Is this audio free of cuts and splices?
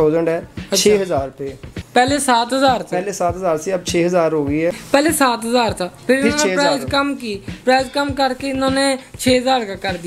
no; 1 cut; at 4.8 s

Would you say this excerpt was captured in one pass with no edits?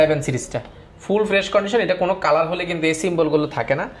yes; 0 cuts

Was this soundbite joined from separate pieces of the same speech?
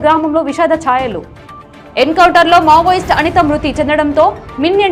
no; 0 cuts

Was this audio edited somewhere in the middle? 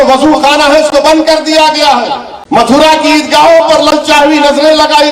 yes; 1 cut; at 2.3 s

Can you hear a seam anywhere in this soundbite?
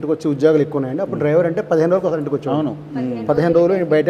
no; 0 cuts

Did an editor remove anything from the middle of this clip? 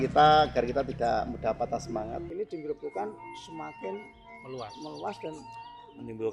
yes; 1 cut; at 2.3 s

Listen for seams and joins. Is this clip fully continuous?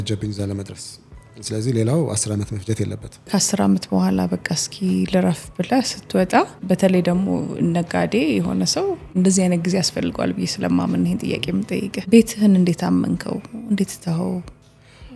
no; 4 cuts; at 3.3 s, 6.6 s, 9.1 s, 12.1 s

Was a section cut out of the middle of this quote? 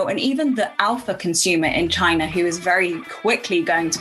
yes; 1 cut; at 3.1 s

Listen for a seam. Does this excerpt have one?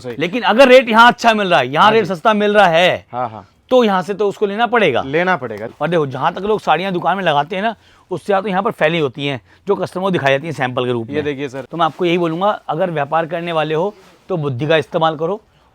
yes; 2 cuts; at 5.6 s, 11.6 s

